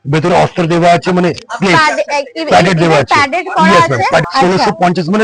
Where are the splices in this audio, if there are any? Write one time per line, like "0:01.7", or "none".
0:04.3

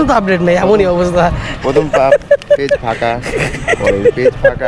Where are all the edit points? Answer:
none

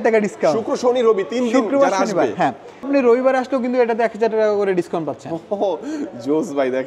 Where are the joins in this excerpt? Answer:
0:02.9

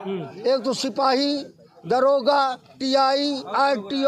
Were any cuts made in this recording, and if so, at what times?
none

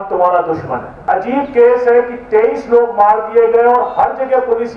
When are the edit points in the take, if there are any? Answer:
0:01.0

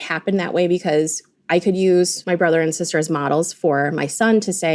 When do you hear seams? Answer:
none

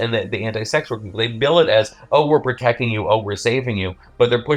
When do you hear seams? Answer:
none

